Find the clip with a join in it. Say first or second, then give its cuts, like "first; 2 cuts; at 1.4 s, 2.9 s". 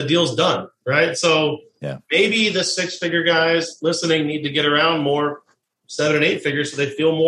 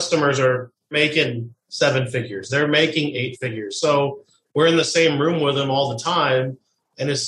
second; 1 cut; at 0.9 s